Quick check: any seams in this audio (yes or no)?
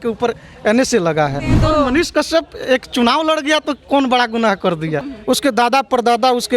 yes